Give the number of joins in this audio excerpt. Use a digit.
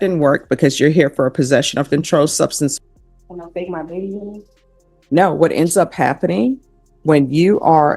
1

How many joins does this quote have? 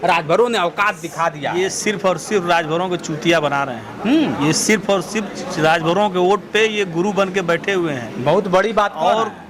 0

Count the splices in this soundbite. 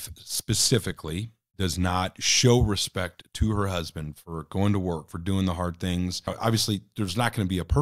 2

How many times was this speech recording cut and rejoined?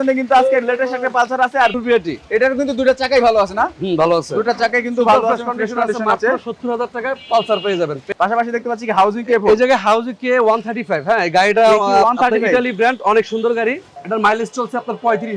3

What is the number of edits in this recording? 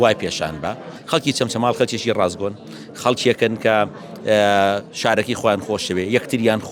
1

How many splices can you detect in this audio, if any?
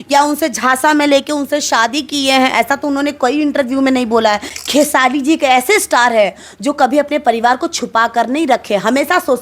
1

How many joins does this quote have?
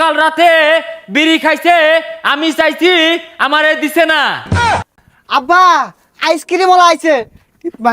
1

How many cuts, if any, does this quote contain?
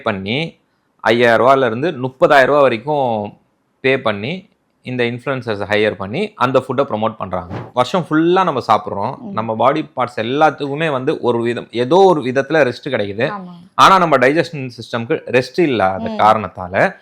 1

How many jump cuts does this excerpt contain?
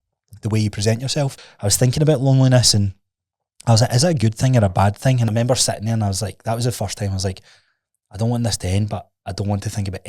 2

